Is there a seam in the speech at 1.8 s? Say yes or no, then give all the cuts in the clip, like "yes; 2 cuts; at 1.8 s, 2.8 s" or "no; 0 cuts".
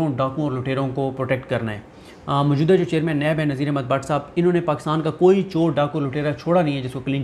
no; 0 cuts